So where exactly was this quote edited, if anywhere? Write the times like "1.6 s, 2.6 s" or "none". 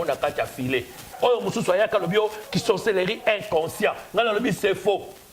1.0 s